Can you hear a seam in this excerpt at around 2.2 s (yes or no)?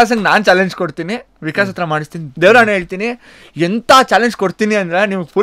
yes